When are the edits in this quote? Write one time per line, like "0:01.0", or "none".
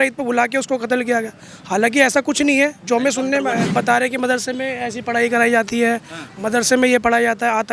0:03.7